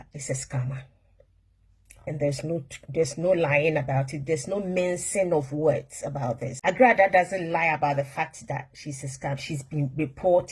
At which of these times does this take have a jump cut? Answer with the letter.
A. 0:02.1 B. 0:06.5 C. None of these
B